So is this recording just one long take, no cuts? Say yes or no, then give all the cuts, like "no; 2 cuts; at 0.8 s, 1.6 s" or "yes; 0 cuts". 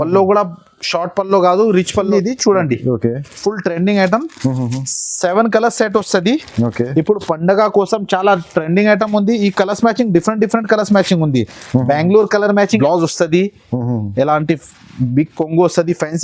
no; 2 cuts; at 2.1 s, 12.8 s